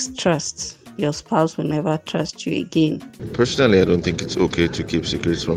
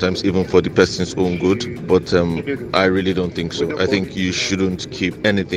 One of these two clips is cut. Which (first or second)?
first